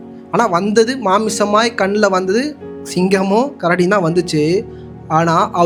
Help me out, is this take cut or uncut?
uncut